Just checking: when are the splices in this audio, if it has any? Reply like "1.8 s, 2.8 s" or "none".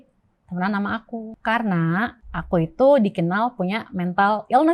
1.3 s, 2.3 s